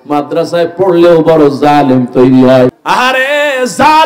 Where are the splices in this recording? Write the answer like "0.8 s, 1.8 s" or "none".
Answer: 3.0 s